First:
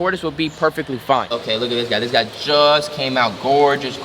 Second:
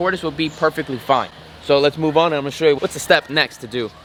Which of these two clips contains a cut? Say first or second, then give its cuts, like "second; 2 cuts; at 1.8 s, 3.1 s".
first; 1 cut; at 1.3 s